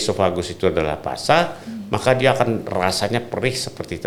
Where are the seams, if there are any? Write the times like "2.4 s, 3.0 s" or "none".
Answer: none